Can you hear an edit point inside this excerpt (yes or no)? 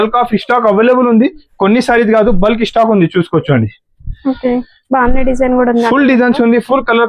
no